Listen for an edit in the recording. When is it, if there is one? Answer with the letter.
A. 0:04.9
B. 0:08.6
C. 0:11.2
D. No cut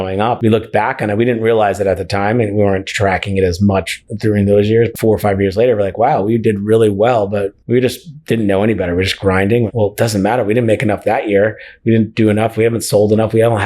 A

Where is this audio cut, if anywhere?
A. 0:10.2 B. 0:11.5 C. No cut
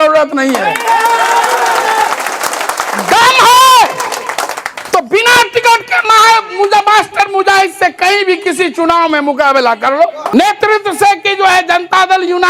A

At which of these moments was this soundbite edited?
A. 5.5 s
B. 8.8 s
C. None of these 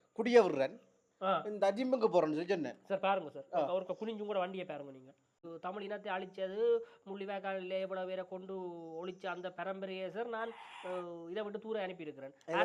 A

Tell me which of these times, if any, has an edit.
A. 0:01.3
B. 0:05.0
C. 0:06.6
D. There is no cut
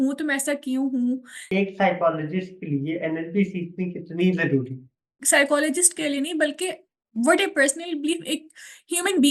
A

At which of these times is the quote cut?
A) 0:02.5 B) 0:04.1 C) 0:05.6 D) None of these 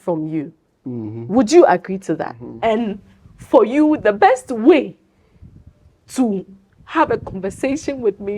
A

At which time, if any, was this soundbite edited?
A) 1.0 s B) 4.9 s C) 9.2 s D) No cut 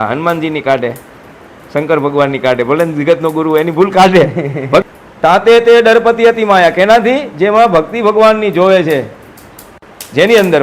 B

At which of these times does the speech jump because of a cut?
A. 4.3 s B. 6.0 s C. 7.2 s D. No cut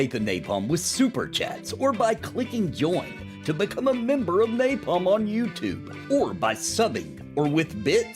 A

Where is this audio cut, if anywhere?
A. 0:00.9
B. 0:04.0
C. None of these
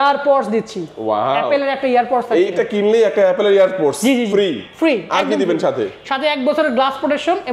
C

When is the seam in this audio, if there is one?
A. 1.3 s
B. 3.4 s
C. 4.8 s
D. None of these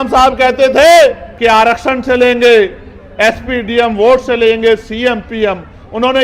A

